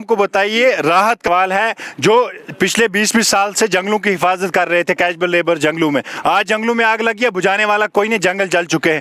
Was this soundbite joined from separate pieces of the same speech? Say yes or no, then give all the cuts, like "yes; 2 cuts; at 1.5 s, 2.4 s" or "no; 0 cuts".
yes; 1 cut; at 1.3 s